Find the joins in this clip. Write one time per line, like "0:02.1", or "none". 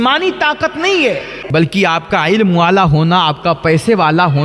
0:01.4

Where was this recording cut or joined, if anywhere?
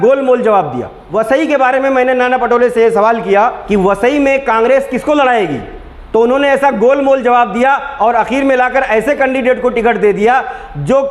0:01.0
0:03.6

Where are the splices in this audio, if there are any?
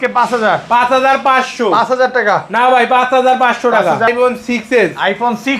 0:04.1

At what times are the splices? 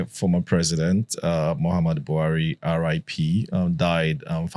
none

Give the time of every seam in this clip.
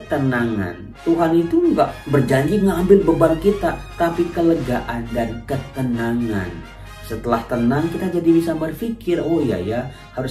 0:00.9
0:02.0

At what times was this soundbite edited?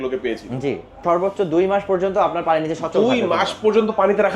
0:01.0

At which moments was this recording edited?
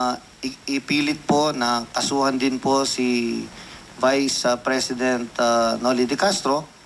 none

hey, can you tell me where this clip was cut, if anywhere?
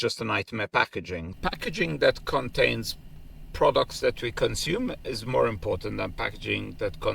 0:01.3

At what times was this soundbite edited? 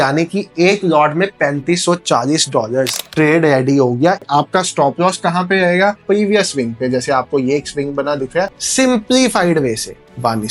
0:03.0
0:04.2
0:06.0
0:08.5

